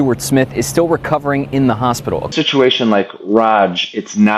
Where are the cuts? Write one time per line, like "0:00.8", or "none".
0:02.3

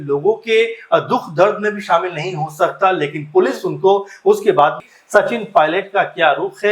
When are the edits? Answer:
0:04.8

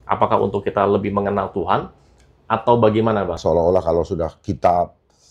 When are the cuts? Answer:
0:03.4

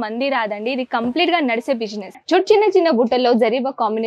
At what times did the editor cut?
0:02.1

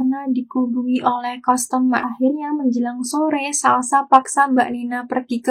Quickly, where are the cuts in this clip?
none

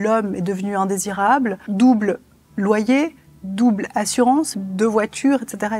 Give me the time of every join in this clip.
0:01.6
0:04.6

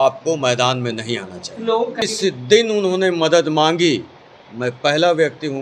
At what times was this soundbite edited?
0:02.0

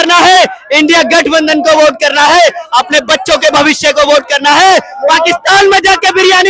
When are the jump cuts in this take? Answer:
none

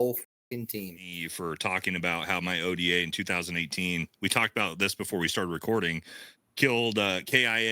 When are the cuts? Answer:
0:01.2

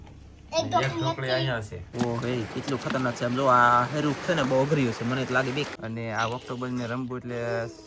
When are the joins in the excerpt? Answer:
0:01.8
0:05.8

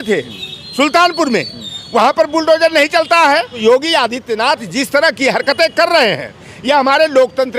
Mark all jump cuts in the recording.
0:03.6

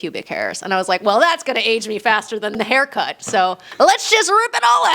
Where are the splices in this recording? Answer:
0:02.6
0:03.6

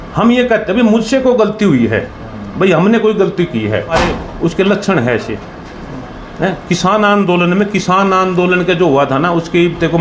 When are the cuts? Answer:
0:03.9

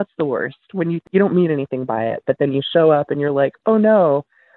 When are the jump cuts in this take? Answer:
0:01.0

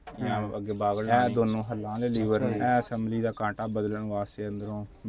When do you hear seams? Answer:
0:01.1
0:02.5

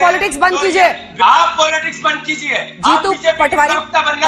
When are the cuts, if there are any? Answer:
0:01.1

